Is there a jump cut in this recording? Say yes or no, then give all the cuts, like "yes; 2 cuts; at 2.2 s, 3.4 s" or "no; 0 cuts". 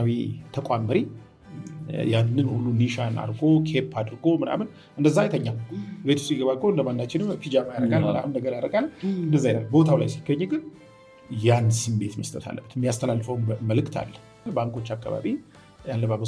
yes; 1 cut; at 14.5 s